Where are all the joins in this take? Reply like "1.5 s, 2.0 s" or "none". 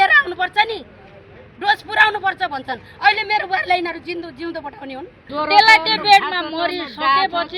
5.2 s